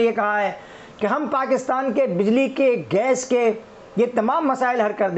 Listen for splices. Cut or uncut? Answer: uncut